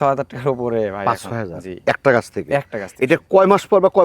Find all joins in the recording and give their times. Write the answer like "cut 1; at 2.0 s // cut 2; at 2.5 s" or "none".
none

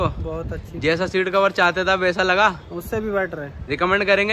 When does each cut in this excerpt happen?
none

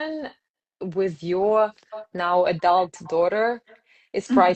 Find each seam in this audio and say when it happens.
none

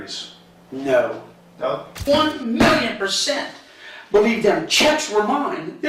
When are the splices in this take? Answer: cut 1; at 1.9 s

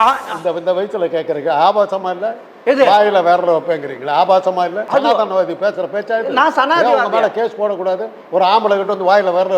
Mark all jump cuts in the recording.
cut 1; at 4.8 s

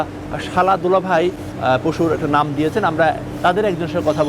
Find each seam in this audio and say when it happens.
cut 1; at 1.5 s

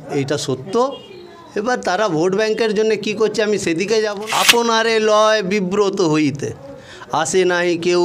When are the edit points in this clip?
cut 1; at 4.2 s

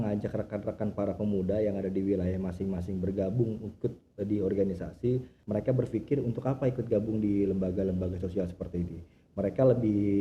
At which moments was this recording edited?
cut 1; at 5.3 s

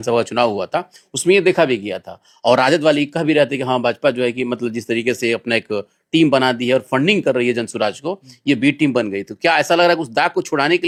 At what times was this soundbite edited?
none

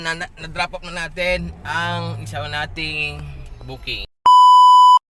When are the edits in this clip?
cut 1; at 4.1 s

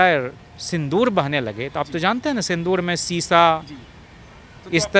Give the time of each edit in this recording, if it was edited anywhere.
none

